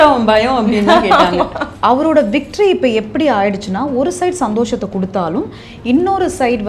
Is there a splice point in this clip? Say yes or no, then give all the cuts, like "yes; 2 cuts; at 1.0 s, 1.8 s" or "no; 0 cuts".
yes; 1 cut; at 1.6 s